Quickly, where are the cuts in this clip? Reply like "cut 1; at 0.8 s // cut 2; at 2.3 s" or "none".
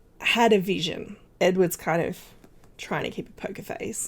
none

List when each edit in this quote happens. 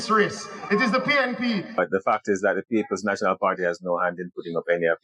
cut 1; at 1.9 s

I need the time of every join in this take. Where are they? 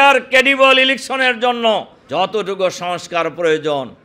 cut 1; at 2.0 s

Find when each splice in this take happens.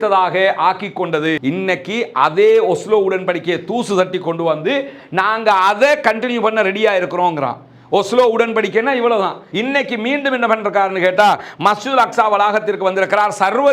cut 1; at 1.4 s // cut 2; at 9.4 s

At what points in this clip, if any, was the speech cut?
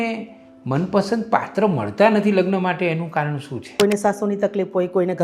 cut 1; at 3.7 s

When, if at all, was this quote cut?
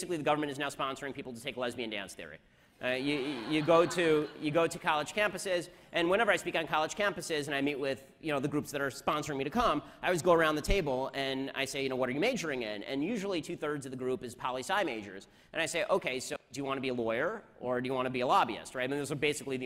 cut 1; at 10.1 s

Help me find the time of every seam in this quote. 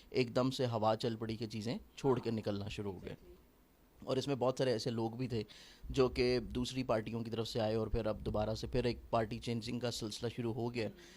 none

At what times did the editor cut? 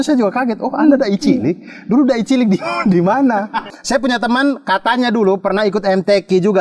cut 1; at 3.7 s

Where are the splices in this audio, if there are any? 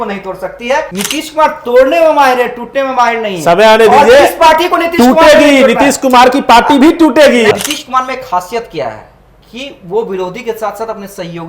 cut 1; at 0.9 s // cut 2; at 7.5 s

